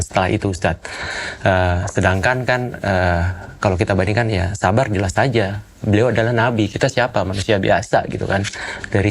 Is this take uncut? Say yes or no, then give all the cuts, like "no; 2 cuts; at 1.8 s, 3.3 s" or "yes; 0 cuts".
yes; 0 cuts